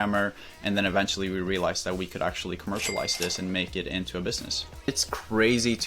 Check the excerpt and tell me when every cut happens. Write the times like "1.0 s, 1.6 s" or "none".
4.9 s